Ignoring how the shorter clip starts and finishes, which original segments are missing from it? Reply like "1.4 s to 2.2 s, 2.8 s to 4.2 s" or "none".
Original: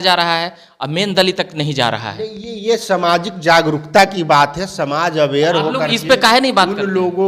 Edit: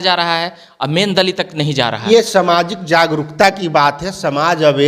2.0 s to 2.5 s